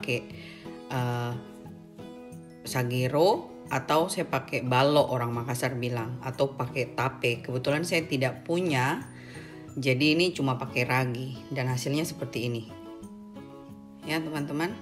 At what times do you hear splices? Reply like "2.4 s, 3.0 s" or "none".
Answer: 12.7 s, 14.0 s

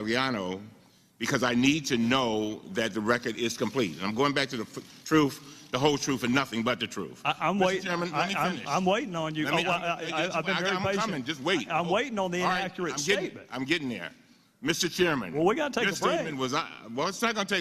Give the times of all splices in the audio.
12.7 s

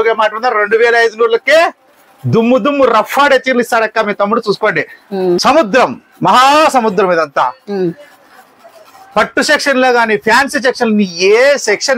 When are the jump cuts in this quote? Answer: 5.4 s

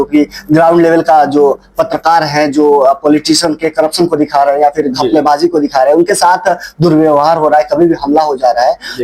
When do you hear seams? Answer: none

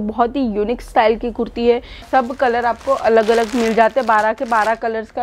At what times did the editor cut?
2.1 s

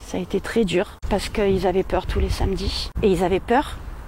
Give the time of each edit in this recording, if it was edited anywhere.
1.0 s, 2.8 s

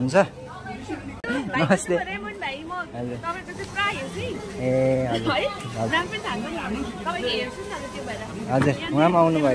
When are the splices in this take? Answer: 1.3 s

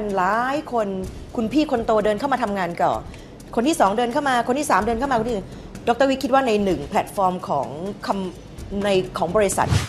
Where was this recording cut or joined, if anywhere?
none

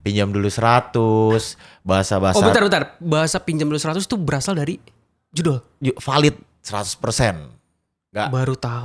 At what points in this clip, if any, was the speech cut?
none

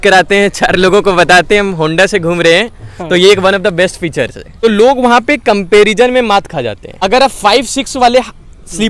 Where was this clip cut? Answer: 4.4 s, 7.0 s

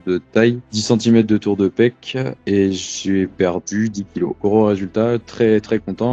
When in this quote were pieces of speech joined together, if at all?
2.3 s, 4.4 s

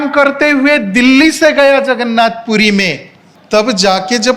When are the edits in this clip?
3.3 s

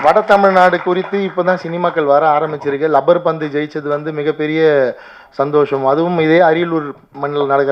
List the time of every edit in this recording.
none

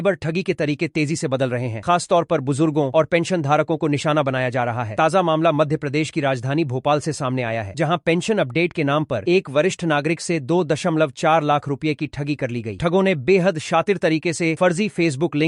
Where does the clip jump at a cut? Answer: none

